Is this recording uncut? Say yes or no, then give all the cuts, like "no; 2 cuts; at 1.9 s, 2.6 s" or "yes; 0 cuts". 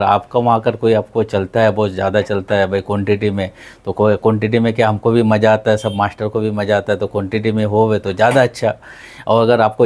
yes; 0 cuts